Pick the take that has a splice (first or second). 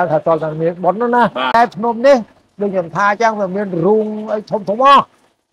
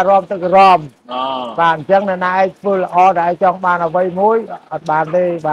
first